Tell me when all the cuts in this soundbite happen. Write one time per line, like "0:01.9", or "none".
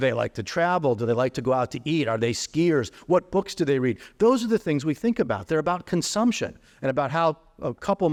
none